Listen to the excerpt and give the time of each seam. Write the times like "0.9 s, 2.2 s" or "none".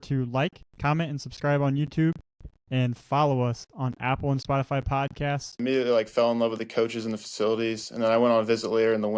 5.6 s